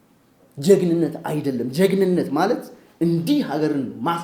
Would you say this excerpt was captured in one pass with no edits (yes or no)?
yes